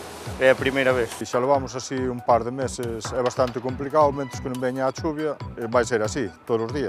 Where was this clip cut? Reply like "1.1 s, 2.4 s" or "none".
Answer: 1.2 s